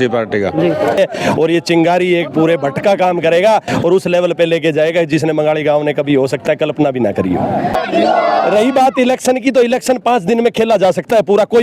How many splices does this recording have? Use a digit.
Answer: 2